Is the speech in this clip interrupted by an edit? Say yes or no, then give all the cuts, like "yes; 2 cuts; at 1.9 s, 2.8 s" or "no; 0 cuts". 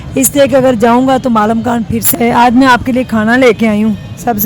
yes; 1 cut; at 2.0 s